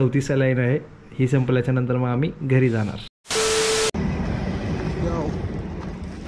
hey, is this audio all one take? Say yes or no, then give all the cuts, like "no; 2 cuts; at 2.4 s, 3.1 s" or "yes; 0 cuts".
yes; 0 cuts